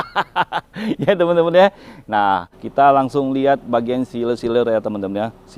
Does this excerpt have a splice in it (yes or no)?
yes